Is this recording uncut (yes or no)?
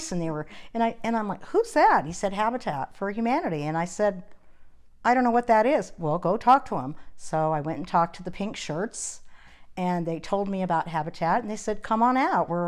yes